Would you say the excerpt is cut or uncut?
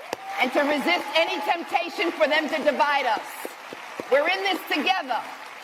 uncut